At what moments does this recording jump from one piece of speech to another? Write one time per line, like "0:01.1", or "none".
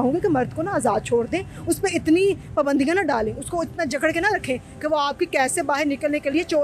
none